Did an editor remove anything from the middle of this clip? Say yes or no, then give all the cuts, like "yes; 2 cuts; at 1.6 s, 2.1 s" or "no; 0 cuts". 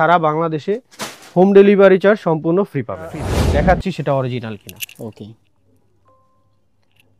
yes; 1 cut; at 3.3 s